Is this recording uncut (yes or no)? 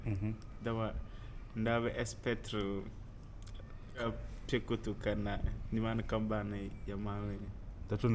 no